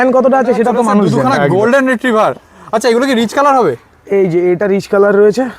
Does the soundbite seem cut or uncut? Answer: uncut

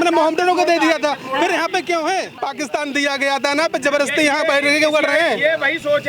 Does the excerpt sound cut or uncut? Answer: cut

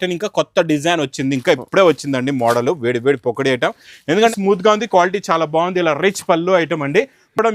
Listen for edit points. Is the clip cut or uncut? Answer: cut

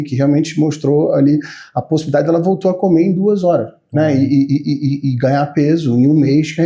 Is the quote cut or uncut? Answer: uncut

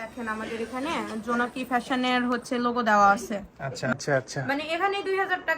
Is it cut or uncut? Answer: cut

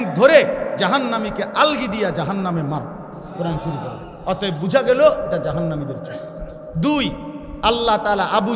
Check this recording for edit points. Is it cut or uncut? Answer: cut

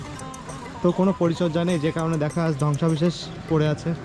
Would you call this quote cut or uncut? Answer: uncut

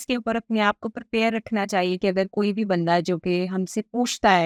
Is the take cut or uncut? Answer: uncut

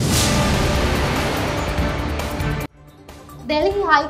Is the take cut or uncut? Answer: cut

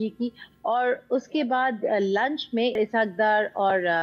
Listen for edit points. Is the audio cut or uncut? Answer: cut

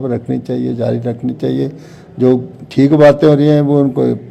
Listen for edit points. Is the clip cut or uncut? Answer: uncut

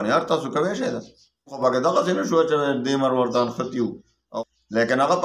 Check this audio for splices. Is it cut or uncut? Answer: cut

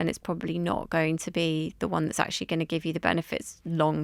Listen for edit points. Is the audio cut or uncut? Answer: uncut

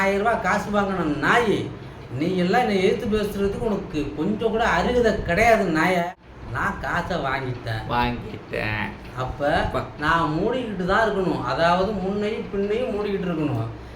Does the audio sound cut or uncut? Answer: cut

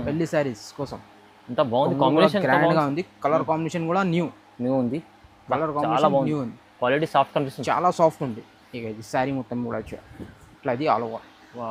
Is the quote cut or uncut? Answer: uncut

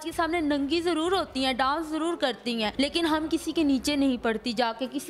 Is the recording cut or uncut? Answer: cut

